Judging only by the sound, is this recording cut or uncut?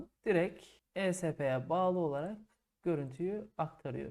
uncut